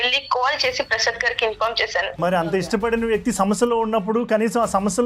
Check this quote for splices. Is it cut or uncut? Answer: cut